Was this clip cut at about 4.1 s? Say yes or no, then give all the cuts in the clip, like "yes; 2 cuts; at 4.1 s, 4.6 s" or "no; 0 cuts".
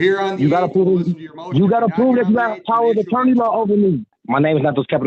yes; 1 cut; at 4.1 s